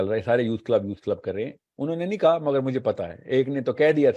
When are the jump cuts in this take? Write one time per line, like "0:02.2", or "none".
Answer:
0:01.6